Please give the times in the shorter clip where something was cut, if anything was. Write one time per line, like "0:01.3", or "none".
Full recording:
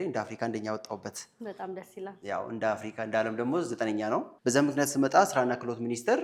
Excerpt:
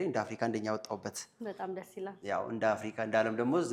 none